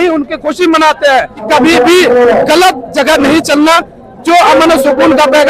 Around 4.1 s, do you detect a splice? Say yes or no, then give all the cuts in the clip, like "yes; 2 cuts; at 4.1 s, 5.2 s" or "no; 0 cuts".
no; 1 cut; at 1.4 s